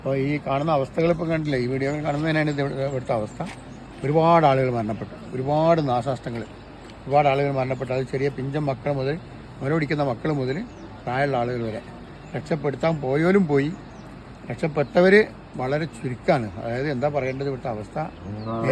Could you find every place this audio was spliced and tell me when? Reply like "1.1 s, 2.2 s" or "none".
none

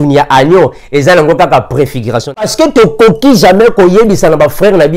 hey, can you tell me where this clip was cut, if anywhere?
2.4 s

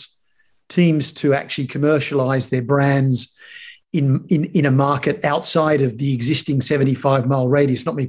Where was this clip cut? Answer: none

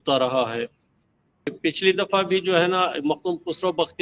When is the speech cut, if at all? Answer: 1.5 s

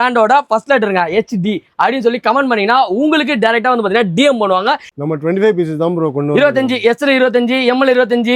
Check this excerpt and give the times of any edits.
4.9 s

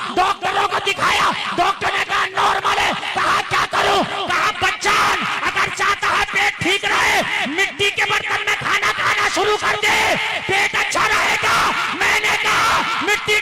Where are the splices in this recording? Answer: none

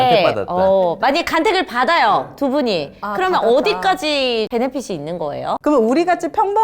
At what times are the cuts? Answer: 4.5 s, 5.6 s

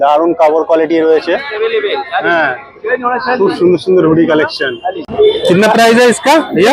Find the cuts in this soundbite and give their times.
5.0 s

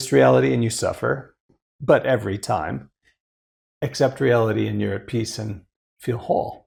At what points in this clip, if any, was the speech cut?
none

